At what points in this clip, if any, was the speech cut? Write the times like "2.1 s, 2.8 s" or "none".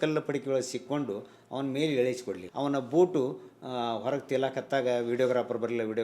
2.4 s